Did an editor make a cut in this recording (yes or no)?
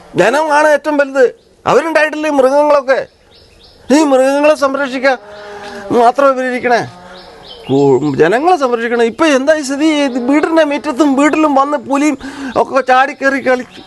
no